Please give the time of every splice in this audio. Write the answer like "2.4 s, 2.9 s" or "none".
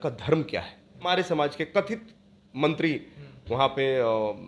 1.1 s